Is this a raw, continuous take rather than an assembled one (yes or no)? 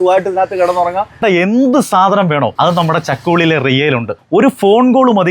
no